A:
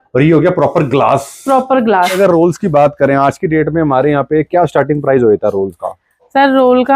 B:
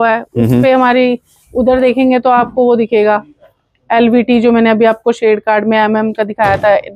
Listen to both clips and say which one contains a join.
A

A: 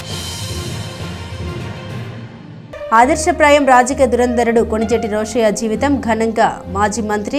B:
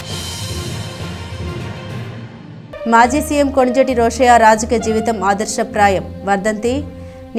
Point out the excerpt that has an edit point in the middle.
B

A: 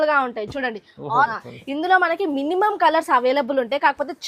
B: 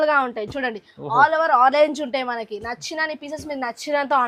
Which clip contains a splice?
A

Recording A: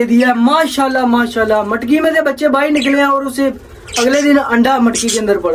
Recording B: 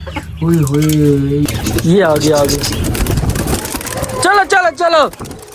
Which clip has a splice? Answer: B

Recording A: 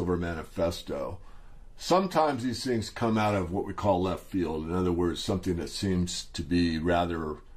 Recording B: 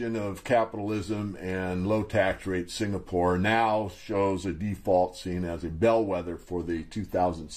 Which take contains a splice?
B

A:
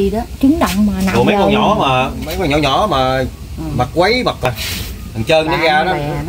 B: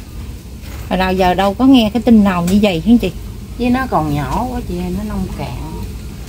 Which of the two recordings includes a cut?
A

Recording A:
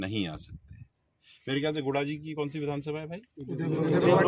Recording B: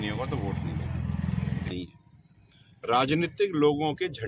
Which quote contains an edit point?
B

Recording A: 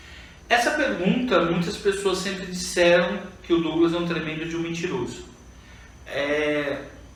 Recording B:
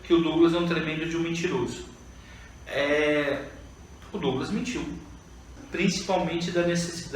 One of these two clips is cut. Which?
B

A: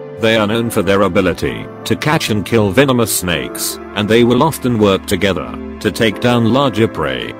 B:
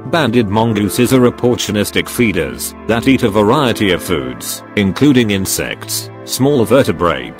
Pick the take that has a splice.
B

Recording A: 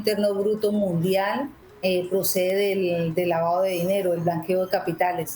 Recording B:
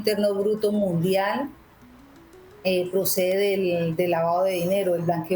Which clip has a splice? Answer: A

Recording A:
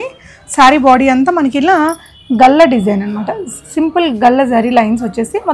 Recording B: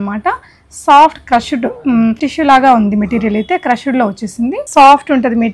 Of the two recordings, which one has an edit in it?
B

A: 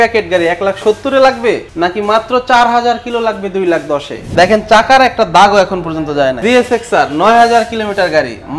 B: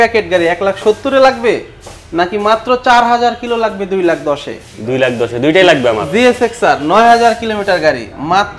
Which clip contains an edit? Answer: A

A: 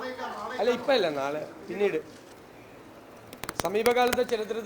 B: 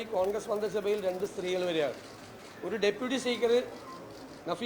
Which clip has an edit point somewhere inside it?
A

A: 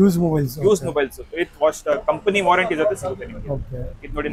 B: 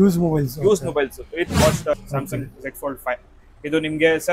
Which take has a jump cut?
B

